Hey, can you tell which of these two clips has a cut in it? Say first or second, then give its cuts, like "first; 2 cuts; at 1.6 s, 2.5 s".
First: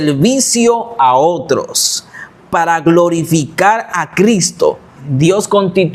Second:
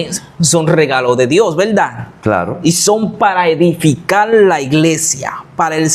first; 1 cut; at 4.9 s